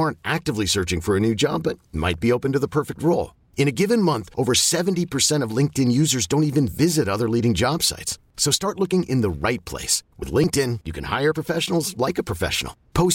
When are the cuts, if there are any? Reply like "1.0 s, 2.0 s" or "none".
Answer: none